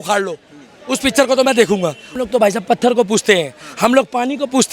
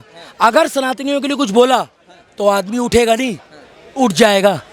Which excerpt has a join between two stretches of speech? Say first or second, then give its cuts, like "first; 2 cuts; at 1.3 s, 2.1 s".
first; 1 cut; at 2.1 s